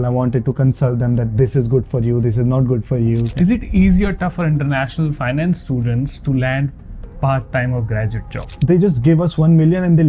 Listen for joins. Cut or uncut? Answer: cut